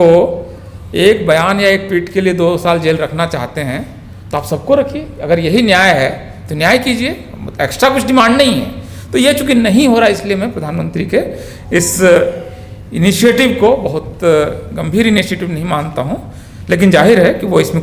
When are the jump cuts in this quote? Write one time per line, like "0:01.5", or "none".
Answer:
none